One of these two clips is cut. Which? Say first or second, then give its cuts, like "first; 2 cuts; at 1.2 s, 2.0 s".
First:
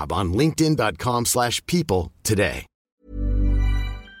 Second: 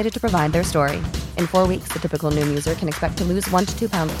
first; 1 cut; at 2.9 s